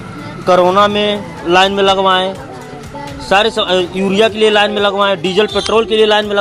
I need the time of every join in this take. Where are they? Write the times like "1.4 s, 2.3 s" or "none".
none